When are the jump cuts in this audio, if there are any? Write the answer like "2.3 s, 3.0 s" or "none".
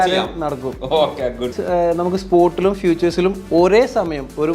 1.6 s